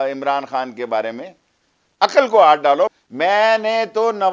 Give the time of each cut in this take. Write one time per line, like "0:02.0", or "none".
0:03.0

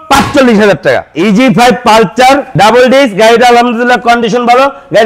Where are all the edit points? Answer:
0:01.1
0:02.5

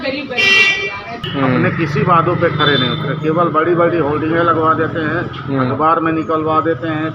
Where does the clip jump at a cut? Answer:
0:01.2

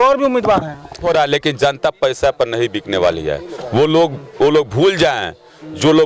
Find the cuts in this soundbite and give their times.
0:01.0

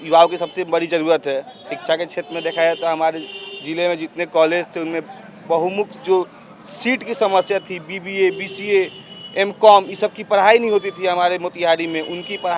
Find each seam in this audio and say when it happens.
none

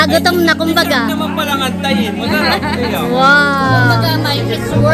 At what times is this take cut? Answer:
none

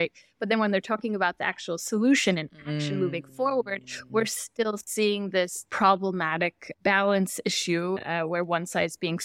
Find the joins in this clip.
0:05.6
0:06.6
0:08.0

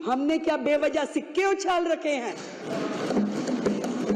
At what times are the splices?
none

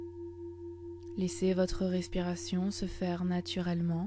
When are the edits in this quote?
0:01.1

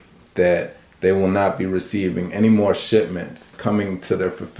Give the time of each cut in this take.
0:03.5

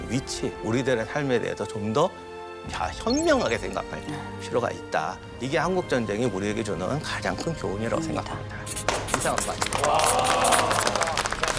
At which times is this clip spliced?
0:05.3

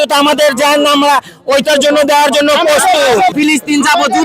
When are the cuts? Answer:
0:03.3

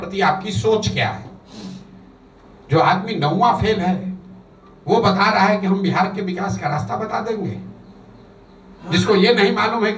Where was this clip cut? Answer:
none

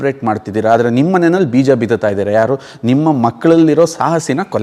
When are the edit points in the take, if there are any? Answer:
none

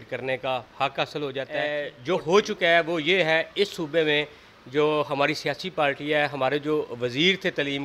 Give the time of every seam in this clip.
0:01.7

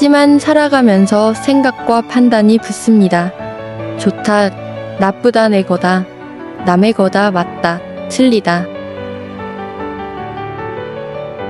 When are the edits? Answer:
0:08.6

